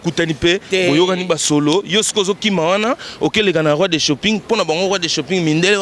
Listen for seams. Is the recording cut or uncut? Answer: uncut